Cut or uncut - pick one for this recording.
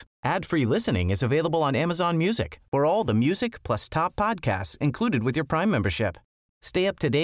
uncut